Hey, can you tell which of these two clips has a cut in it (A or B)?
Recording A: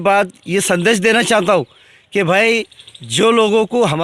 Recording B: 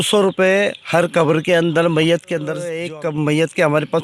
B